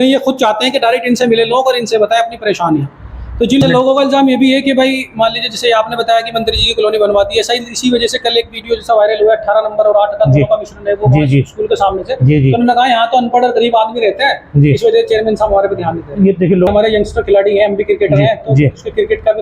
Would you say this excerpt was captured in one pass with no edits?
no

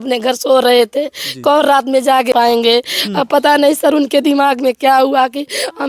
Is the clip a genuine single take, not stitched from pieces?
no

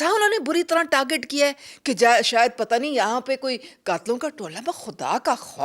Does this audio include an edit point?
no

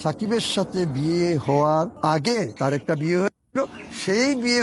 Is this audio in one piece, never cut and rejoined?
no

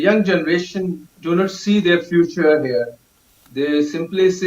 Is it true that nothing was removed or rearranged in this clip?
no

